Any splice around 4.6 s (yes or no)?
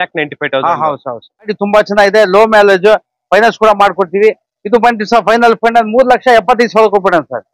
no